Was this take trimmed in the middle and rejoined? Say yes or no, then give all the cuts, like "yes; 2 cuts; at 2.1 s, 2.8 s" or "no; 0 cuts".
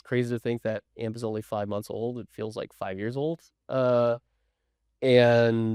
no; 0 cuts